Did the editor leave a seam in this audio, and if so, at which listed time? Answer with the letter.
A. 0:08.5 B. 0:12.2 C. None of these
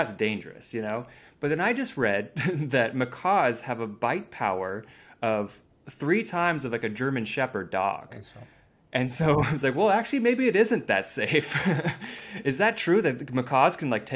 C